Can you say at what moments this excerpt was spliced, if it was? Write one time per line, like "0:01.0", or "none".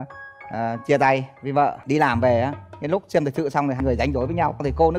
0:01.8